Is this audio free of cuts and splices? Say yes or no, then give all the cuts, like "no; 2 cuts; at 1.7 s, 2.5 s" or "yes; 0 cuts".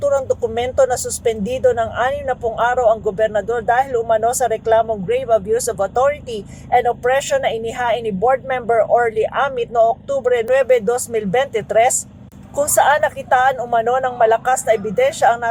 yes; 0 cuts